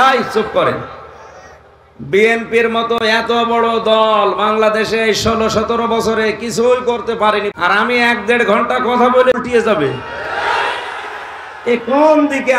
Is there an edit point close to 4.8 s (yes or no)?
no